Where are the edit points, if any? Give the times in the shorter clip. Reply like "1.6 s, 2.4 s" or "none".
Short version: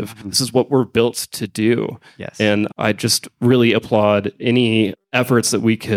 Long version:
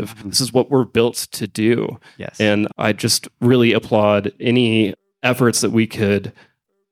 5.0 s